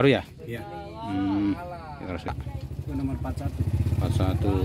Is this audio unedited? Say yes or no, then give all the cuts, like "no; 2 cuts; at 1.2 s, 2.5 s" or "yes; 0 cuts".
no; 1 cut; at 2.3 s